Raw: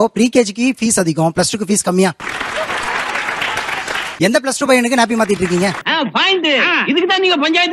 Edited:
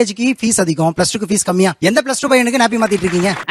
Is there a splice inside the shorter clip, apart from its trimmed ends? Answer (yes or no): yes